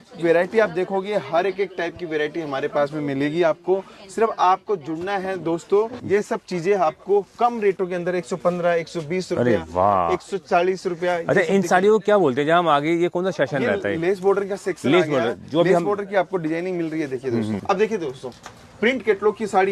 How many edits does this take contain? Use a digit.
2